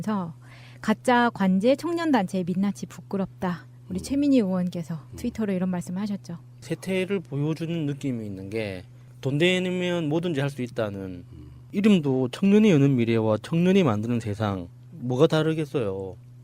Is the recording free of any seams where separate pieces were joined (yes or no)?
yes